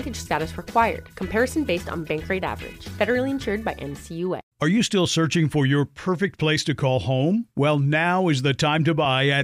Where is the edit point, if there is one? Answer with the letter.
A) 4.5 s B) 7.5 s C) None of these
A